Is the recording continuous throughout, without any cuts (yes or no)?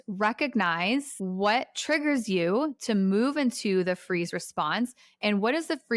no